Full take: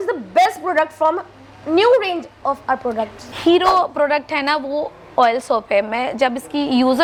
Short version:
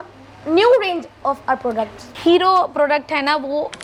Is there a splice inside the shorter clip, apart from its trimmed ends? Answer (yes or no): no